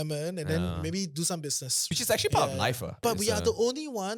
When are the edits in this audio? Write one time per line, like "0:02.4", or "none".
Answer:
0:01.7
0:03.0